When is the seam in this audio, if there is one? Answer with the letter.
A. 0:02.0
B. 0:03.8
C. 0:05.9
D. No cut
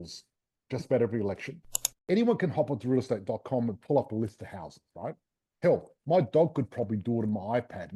A